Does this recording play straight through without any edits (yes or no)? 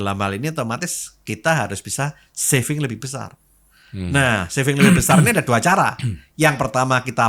yes